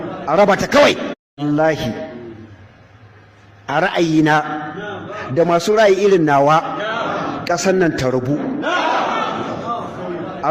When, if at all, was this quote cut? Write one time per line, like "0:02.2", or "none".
0:01.2